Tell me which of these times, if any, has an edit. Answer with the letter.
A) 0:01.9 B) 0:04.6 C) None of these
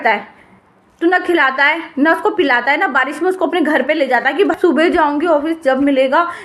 B